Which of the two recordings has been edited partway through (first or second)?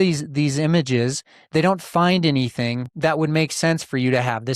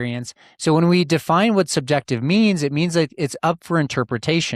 first